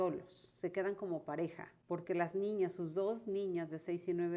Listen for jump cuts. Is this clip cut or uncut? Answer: cut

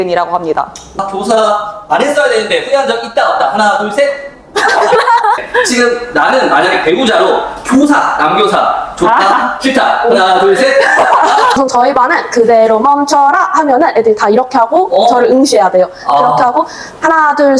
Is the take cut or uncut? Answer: cut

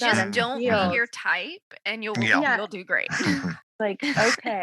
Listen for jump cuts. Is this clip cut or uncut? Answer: cut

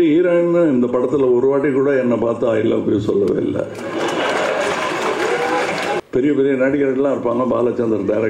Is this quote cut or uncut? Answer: cut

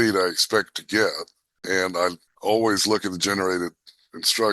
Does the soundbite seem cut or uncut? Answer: cut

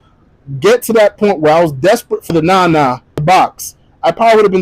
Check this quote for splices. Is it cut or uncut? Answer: cut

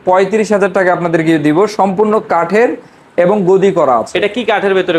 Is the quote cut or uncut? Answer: uncut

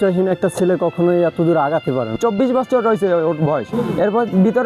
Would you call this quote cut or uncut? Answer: cut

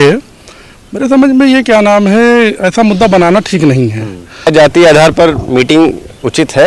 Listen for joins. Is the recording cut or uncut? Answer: cut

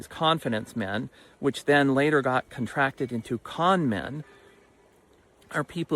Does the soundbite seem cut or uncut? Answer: uncut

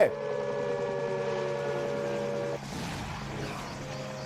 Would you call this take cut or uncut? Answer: cut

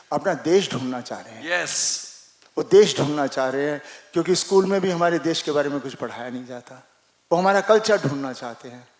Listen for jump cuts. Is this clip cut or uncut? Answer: uncut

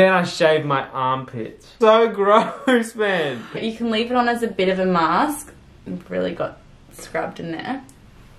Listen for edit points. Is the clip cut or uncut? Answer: uncut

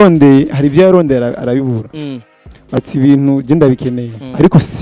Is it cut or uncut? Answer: cut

